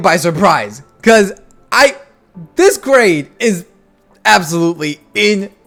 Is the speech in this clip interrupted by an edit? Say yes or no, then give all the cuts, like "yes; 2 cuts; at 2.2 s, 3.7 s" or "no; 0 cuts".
no; 0 cuts